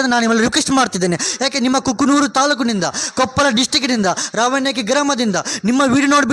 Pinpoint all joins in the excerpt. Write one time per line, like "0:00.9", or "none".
none